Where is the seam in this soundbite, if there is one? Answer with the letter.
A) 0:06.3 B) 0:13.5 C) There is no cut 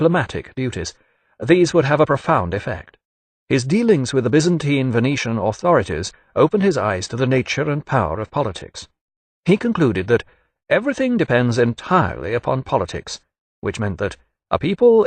C